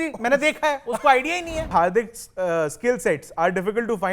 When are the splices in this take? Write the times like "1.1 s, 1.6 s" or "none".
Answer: 1.7 s